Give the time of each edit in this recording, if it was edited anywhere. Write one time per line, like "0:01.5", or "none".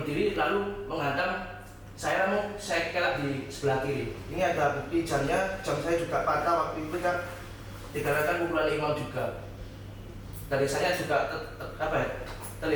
none